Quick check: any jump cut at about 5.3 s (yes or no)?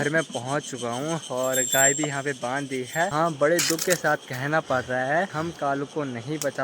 yes